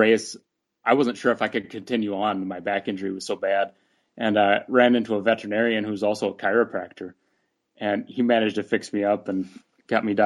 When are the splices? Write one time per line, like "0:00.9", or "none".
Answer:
none